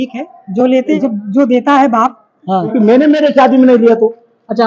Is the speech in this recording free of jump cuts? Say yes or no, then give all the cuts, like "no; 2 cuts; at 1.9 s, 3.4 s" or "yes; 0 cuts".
no; 2 cuts; at 0.9 s, 2.7 s